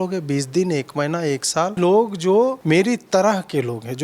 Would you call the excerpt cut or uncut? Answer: cut